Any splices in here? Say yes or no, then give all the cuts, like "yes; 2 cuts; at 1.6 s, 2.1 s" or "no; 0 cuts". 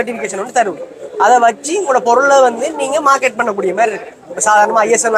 no; 0 cuts